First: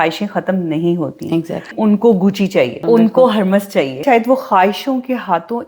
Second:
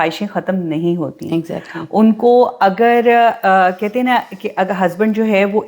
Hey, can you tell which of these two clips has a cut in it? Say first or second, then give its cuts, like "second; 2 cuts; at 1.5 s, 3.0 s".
first; 3 cuts; at 1.7 s, 2.8 s, 4.0 s